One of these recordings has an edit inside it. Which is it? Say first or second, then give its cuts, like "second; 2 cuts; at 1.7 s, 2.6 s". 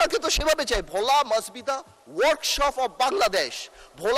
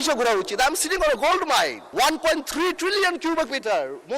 second; 1 cut; at 1.8 s